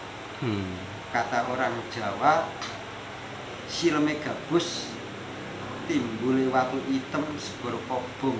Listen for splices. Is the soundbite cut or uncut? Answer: uncut